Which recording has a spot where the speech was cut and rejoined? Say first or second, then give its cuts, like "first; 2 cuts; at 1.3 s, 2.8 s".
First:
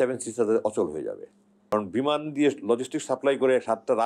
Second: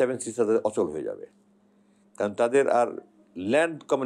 first; 1 cut; at 1.7 s